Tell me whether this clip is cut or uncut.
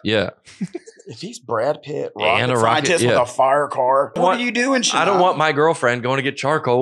cut